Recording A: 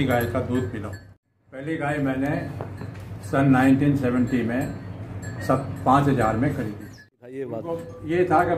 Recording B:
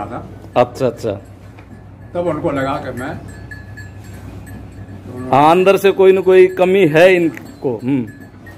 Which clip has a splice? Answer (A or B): A